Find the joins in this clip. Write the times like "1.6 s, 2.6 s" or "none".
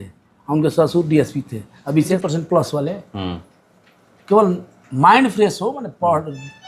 2.1 s